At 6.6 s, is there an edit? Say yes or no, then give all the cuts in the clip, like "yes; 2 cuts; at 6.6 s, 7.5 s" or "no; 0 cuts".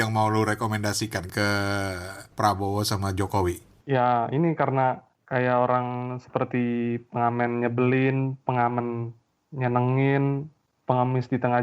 no; 4 cuts; at 1.3 s, 2.3 s, 3.7 s, 5.1 s